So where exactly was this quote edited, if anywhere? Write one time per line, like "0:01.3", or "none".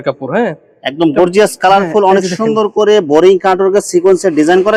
none